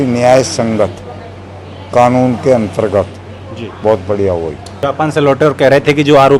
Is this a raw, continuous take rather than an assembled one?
no; 1 cut; at 4.8 s

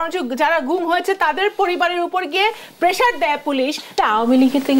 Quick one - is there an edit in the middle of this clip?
yes; 1 cut; at 3.8 s

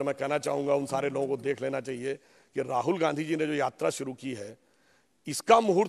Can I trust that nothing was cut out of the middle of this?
yes; 0 cuts

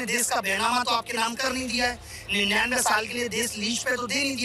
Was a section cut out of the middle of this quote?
no; 0 cuts

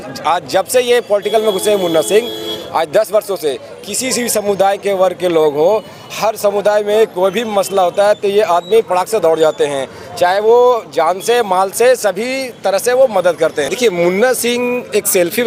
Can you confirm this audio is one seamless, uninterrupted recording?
yes; 0 cuts

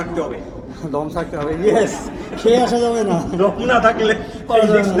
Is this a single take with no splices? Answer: yes; 0 cuts

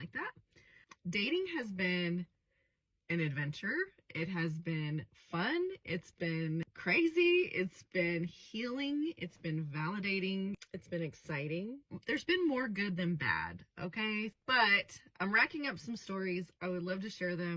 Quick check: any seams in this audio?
yes; 1 cut; at 5.6 s

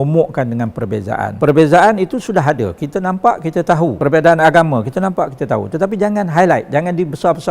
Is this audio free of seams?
no; 2 cuts; at 1.3 s, 4.0 s

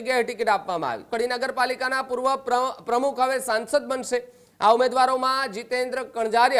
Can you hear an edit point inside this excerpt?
yes; 1 cut; at 1.0 s

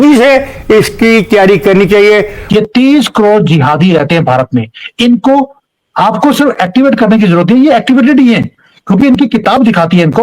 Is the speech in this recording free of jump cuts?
no; 1 cut; at 2.4 s

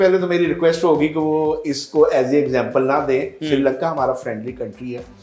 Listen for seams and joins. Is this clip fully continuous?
yes; 0 cuts

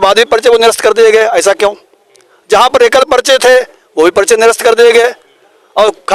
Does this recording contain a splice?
no; 0 cuts

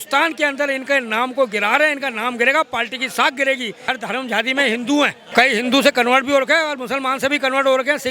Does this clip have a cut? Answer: yes; 2 cuts; at 3.8 s, 5.2 s

